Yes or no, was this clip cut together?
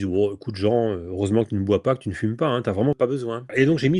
yes